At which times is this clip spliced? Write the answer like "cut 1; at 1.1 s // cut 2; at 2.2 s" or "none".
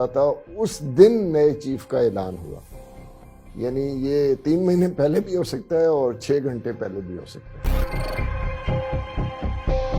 cut 1; at 7.8 s